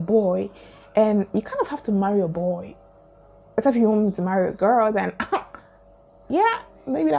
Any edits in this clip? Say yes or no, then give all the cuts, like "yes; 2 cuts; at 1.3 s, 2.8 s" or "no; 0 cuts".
no; 0 cuts